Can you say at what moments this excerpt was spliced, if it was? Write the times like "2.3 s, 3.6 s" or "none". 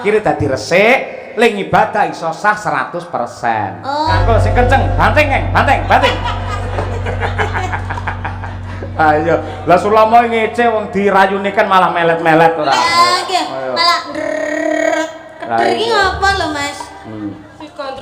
4.2 s